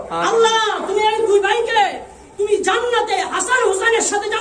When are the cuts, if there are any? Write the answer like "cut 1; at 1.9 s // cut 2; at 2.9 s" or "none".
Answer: none